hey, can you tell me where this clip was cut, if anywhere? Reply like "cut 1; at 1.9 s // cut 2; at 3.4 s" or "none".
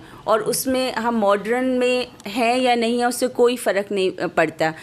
none